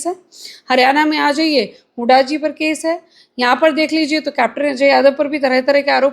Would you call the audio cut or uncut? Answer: uncut